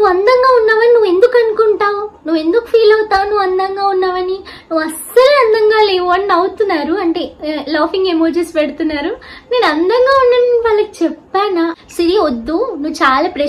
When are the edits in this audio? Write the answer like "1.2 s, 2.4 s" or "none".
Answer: 11.8 s